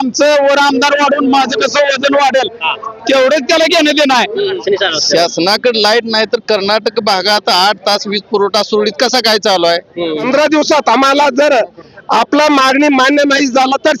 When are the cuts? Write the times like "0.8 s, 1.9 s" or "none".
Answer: 4.6 s, 10.3 s